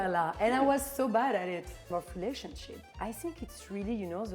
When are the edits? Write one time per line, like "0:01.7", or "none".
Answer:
0:01.8